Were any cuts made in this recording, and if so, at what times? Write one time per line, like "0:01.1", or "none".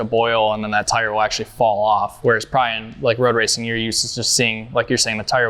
none